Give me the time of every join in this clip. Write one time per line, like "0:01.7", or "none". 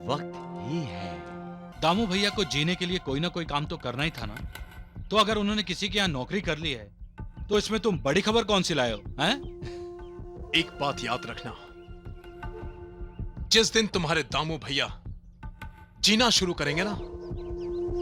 0:01.7